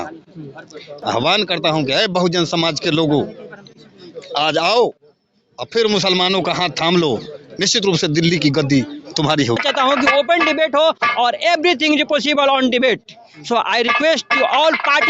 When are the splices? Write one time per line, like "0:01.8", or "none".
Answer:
0:01.0
0:09.6